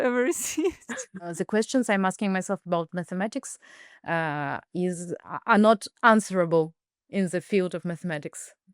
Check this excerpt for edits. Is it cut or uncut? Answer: cut